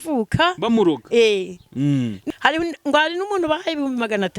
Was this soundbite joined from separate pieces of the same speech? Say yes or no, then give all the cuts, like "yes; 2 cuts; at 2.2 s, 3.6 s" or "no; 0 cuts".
yes; 1 cut; at 2.2 s